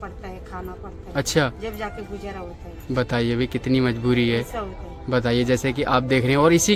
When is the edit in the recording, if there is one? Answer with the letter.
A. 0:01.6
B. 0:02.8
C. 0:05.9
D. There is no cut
D